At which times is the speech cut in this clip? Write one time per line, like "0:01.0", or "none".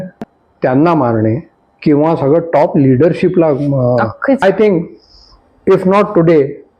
0:04.4